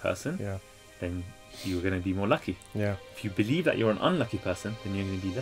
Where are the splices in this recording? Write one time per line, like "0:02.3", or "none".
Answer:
none